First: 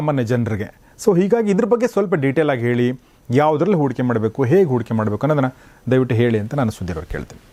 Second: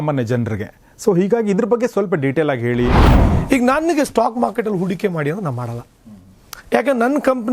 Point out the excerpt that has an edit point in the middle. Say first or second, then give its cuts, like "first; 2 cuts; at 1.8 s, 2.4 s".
second; 1 cut; at 3.1 s